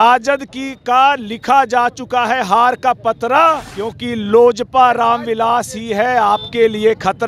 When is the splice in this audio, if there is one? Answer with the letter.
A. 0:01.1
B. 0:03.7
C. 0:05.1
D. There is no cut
B